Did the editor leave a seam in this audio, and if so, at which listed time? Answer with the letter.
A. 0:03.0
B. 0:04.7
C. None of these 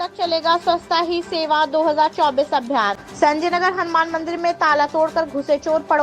A